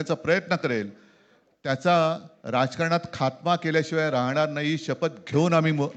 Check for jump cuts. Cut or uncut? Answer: uncut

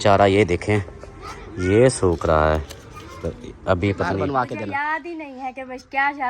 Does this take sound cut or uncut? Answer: cut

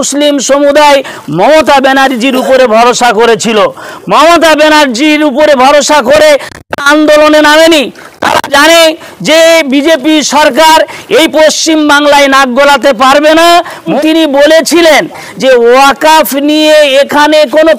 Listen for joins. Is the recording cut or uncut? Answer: cut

